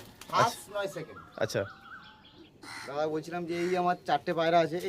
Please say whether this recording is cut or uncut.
uncut